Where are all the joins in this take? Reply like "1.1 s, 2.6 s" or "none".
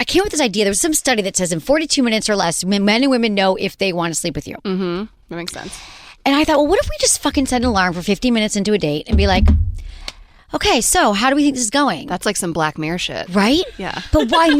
none